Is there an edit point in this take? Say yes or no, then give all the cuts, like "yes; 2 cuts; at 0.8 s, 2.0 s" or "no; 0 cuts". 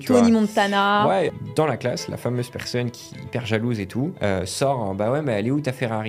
yes; 2 cuts; at 1.3 s, 4.1 s